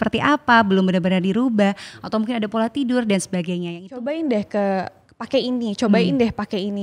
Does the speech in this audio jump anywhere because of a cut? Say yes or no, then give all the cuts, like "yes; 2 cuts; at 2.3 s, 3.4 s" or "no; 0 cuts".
yes; 1 cut; at 3.6 s